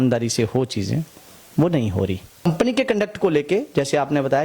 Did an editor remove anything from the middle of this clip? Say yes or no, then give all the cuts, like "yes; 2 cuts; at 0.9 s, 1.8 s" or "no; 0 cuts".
yes; 1 cut; at 2.4 s